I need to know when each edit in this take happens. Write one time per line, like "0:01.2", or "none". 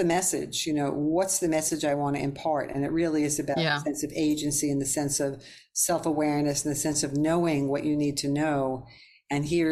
none